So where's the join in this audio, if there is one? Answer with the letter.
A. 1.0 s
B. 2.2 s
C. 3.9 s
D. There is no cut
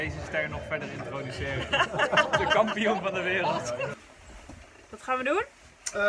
C